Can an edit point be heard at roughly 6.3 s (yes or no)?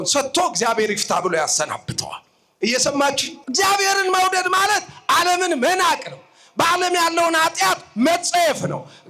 no